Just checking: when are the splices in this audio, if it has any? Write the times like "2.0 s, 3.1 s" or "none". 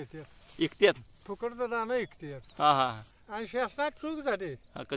3.1 s